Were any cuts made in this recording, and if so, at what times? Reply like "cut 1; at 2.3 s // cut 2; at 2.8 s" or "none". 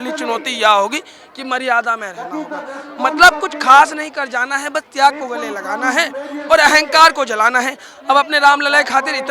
none